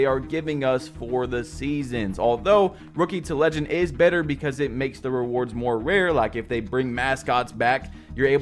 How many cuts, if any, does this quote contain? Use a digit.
0